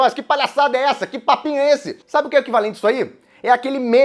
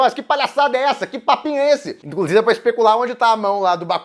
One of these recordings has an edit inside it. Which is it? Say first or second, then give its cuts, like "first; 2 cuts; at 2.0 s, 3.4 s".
second; 1 cut; at 2.0 s